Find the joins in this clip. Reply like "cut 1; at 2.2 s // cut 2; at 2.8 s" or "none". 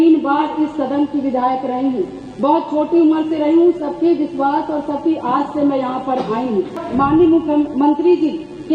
cut 1; at 6.8 s

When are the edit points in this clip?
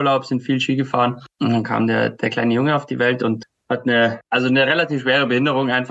none

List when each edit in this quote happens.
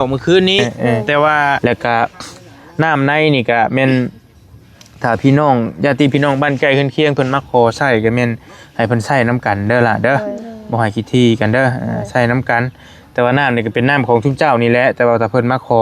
cut 1; at 1.6 s

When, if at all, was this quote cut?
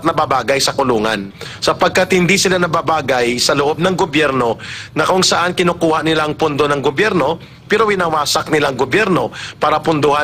none

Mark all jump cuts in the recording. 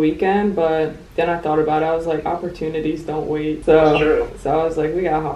cut 1; at 3.6 s // cut 2; at 4.3 s

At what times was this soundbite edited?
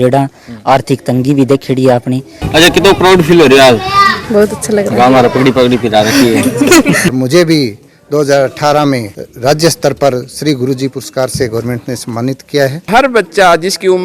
cut 1; at 2.4 s // cut 2; at 7.1 s // cut 3; at 12.8 s

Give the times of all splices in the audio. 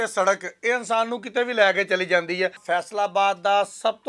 cut 1; at 2.6 s

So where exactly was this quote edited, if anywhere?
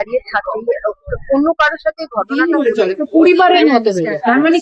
cut 1; at 2.3 s

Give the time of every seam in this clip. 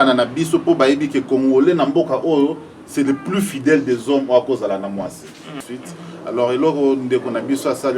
cut 1; at 5.5 s

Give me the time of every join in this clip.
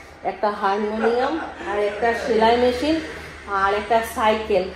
none

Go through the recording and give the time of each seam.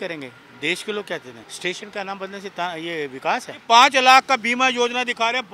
cut 1; at 1.4 s // cut 2; at 3.6 s

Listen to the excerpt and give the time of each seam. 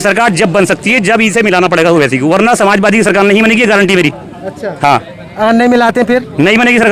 none

